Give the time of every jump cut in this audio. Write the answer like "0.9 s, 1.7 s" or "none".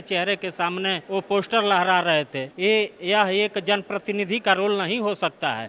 1.0 s, 2.4 s